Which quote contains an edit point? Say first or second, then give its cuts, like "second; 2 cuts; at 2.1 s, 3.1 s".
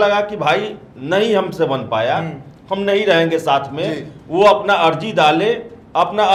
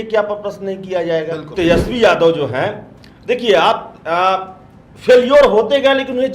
second; 1 cut; at 1.5 s